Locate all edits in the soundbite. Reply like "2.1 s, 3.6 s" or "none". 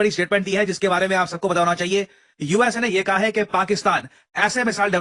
none